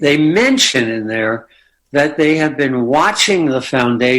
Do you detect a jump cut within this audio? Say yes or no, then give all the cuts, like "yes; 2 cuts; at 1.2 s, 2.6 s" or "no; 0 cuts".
no; 0 cuts